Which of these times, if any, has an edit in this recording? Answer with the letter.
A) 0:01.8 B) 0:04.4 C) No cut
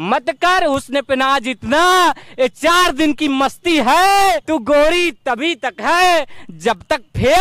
B